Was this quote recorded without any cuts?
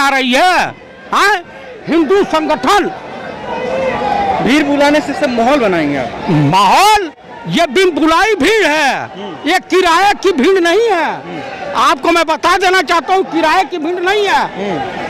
yes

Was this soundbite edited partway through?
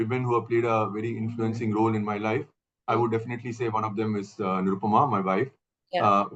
no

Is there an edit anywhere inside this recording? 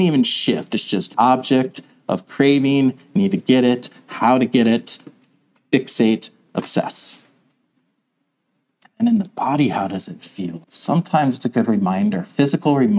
yes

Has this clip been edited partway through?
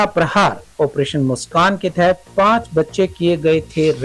no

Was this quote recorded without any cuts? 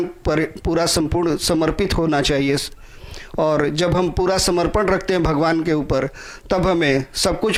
yes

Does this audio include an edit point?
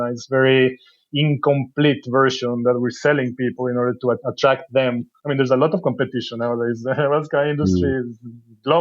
yes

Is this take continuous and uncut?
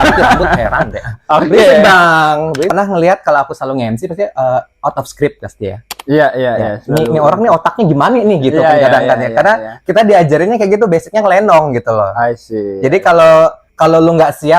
no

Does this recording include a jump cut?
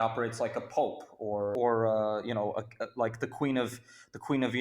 yes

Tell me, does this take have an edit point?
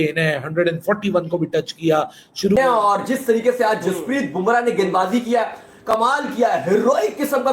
yes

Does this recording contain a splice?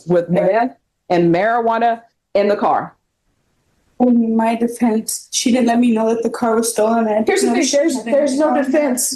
no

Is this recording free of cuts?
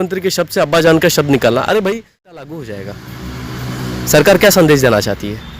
no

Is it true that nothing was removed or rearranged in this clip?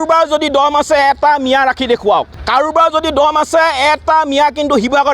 no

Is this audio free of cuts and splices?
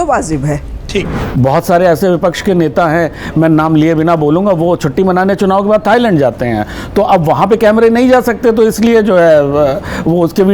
no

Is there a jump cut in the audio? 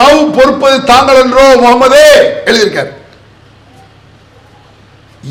no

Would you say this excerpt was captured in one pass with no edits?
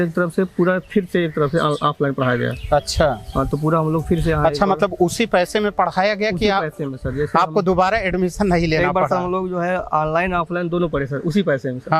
yes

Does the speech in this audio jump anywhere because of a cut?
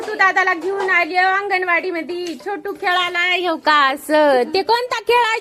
no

